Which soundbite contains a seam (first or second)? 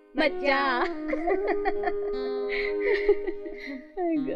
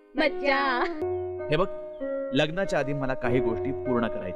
second